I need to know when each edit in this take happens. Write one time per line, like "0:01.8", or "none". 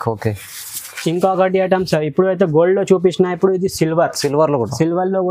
0:00.9

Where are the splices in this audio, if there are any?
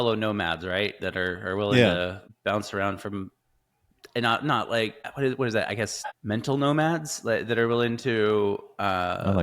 0:02.3
0:05.0
0:06.2

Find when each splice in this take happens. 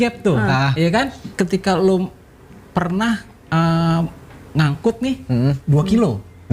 0:01.2

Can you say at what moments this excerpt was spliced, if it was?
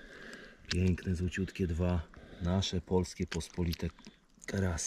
none

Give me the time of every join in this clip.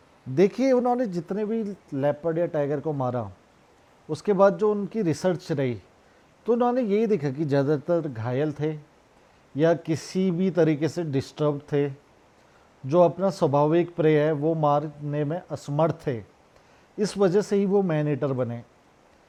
none

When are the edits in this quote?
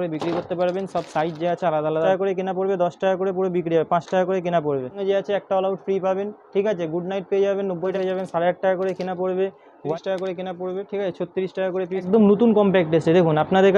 0:02.0
0:05.0
0:08.0
0:09.9
0:12.1

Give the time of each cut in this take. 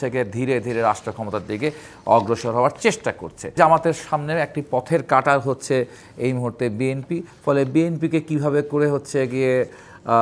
0:03.5
0:07.3

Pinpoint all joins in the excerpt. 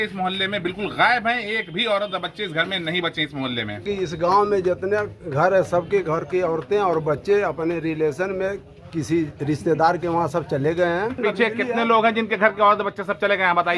0:03.8
0:11.2

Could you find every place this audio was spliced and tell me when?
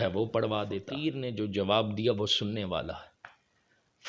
0:01.1

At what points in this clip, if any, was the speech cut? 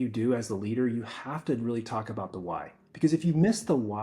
0:02.8

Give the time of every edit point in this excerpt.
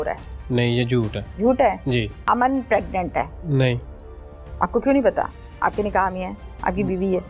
0:01.2
0:02.2
0:03.4

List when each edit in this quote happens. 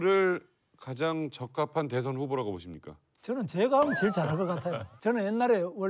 0:04.9

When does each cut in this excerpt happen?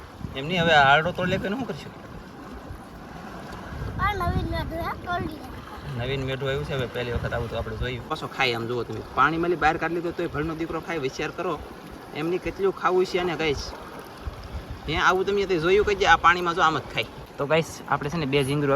0:08.1
0:17.2

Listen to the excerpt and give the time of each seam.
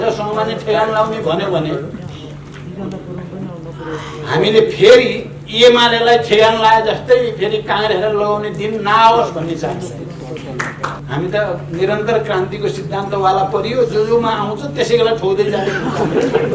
0:10.9

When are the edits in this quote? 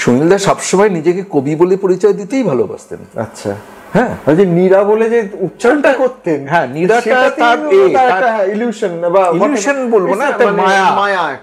none

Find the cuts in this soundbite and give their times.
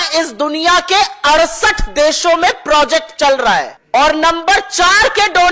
0:03.8

